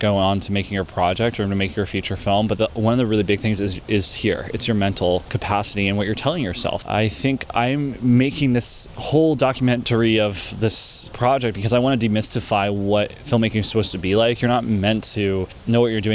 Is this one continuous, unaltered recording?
yes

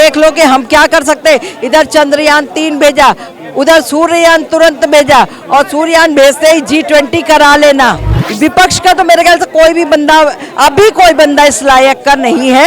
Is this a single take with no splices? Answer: no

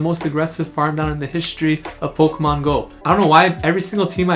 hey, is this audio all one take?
no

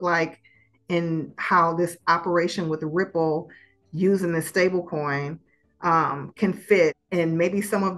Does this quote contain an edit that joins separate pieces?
yes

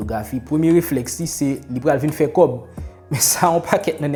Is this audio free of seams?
yes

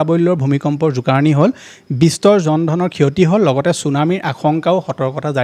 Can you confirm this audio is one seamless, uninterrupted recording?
yes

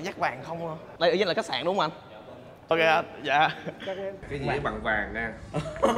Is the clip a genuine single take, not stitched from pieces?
no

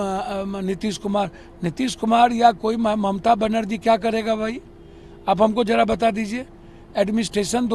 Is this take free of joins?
yes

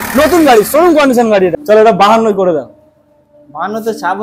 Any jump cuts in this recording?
yes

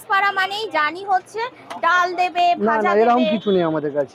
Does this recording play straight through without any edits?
yes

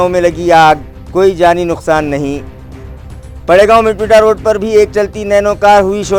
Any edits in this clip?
no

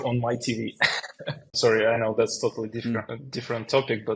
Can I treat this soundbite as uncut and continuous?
no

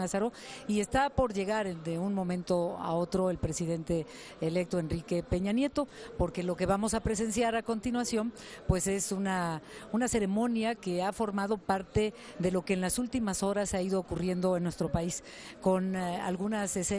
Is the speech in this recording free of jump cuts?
no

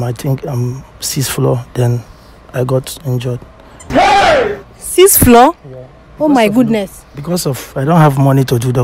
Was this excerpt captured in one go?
yes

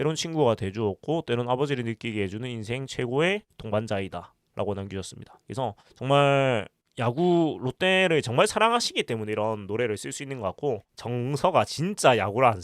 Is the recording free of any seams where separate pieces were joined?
no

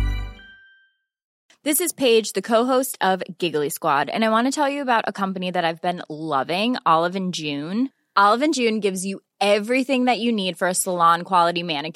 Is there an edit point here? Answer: yes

